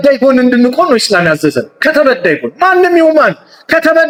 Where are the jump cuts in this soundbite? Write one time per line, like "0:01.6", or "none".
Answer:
none